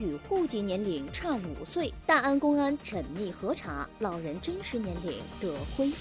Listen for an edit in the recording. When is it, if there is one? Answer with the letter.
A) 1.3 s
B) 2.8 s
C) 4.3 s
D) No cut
D